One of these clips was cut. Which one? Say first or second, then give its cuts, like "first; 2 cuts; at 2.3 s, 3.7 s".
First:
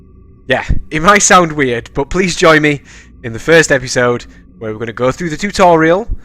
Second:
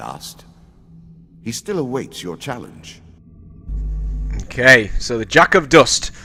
first; 1 cut; at 1.9 s